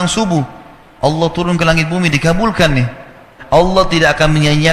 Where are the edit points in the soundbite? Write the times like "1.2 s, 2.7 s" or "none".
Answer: 3.3 s